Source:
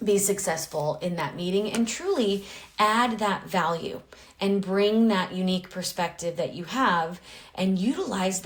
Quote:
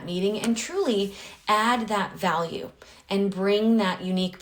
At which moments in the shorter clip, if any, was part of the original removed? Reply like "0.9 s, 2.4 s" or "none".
none